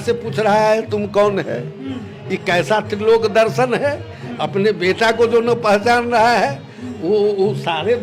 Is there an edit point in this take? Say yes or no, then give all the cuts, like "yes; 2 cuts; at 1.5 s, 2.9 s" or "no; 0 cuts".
no; 0 cuts